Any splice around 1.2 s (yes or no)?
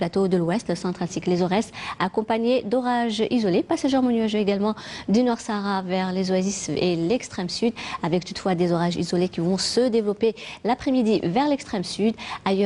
yes